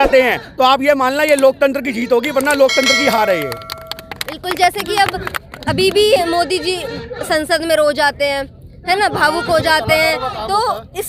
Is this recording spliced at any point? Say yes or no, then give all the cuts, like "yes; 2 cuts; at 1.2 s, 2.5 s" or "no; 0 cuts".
no; 0 cuts